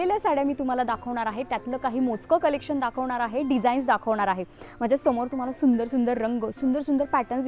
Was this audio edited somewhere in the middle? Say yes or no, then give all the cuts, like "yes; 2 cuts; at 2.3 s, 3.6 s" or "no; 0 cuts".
no; 0 cuts